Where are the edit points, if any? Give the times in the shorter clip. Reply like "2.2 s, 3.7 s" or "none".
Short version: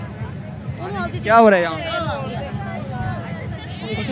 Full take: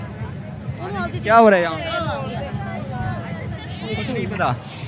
none